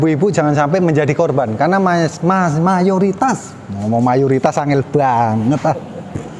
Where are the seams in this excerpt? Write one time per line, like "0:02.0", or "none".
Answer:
none